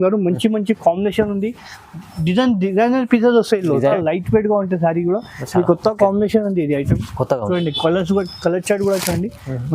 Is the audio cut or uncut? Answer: cut